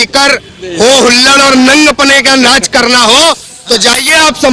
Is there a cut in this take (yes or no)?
no